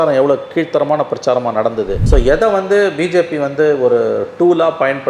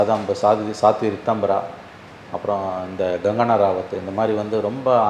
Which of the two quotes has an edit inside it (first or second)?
first